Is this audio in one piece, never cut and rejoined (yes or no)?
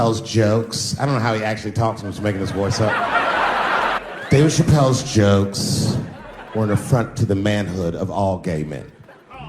no